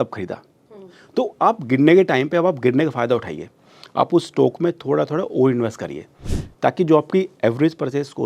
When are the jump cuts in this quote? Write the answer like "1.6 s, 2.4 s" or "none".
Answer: none